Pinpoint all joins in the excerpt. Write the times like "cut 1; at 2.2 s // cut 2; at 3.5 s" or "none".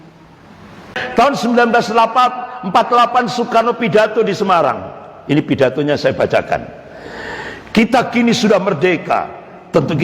cut 1; at 0.9 s